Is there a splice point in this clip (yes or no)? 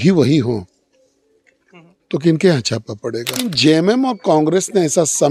yes